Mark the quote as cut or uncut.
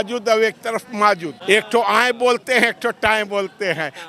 cut